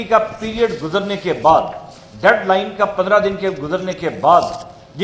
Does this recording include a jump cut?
no; 0 cuts

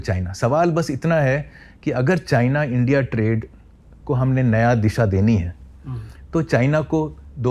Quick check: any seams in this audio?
no; 0 cuts

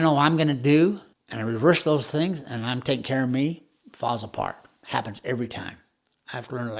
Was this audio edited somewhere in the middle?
yes; 1 cut; at 1.1 s

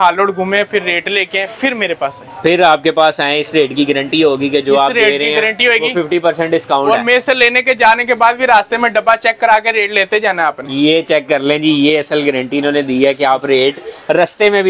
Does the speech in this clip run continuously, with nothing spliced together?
yes; 0 cuts

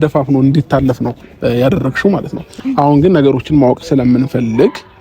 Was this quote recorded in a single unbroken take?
no; 1 cut; at 2.5 s

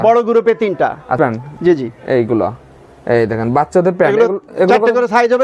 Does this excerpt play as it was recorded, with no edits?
no; 1 cut; at 1.1 s

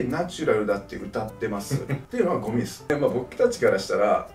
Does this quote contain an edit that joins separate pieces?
yes; 2 cuts; at 2.0 s, 2.9 s

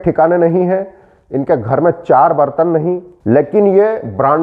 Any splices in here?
yes; 1 cut; at 3.1 s

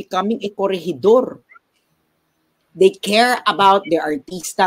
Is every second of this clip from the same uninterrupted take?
no; 1 cut; at 2.6 s

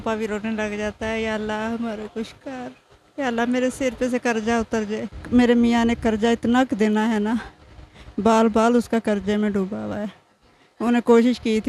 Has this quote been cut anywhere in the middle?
yes; 1 cut; at 5.1 s

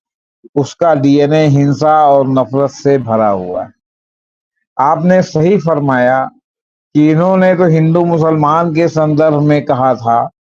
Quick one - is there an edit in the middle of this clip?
no; 0 cuts

